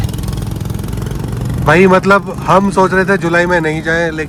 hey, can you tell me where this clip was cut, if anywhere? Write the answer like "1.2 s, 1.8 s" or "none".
none